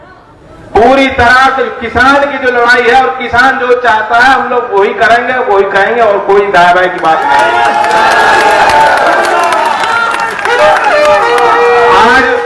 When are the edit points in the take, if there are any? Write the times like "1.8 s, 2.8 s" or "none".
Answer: none